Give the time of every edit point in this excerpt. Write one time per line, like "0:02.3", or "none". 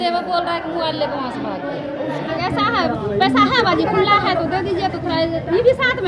0:02.3